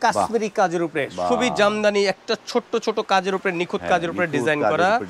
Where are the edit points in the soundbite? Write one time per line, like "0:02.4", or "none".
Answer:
none